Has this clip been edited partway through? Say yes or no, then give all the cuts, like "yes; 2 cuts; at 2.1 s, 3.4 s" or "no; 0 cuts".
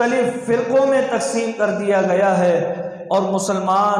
no; 0 cuts